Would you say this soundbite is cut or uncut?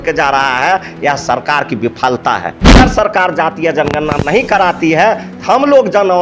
cut